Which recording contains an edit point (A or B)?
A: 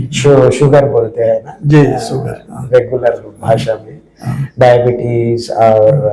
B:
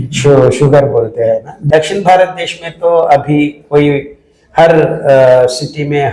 B